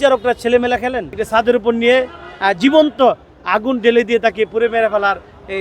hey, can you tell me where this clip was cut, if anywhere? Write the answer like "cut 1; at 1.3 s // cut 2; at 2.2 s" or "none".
cut 1; at 1.3 s